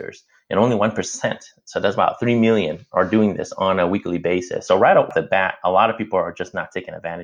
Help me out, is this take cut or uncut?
uncut